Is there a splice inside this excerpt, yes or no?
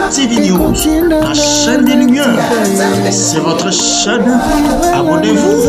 no